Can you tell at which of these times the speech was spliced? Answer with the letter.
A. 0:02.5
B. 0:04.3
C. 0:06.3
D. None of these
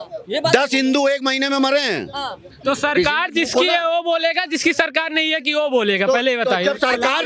A